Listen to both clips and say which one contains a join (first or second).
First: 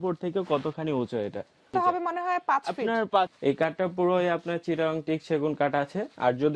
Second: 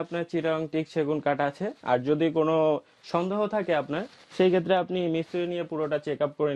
first